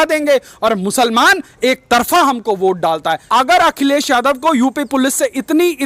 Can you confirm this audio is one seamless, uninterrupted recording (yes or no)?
no